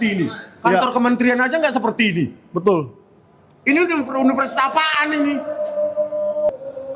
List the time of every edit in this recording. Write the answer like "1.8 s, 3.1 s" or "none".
none